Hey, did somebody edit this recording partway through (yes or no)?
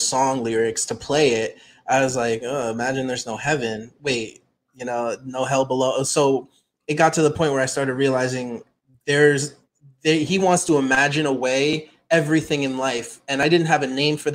no